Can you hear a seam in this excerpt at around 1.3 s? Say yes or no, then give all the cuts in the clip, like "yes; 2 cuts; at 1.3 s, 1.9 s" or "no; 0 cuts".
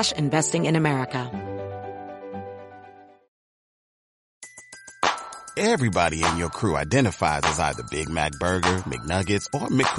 yes; 1 cut; at 1.3 s